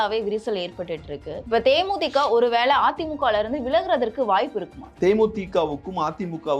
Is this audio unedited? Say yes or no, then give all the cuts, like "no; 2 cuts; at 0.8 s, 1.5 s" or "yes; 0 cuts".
no; 2 cuts; at 1.3 s, 4.9 s